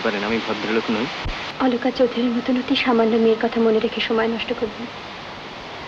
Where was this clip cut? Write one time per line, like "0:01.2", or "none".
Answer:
0:01.4